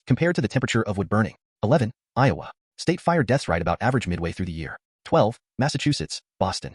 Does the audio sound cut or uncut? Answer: cut